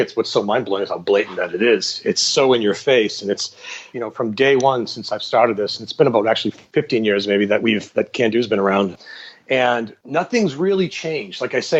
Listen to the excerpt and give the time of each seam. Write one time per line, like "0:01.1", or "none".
0:03.8
0:06.6
0:08.9
0:10.0